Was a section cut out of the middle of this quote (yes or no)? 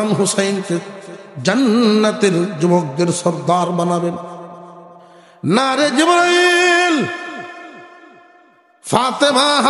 no